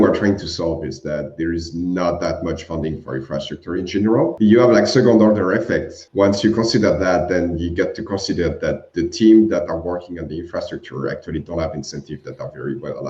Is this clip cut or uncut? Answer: cut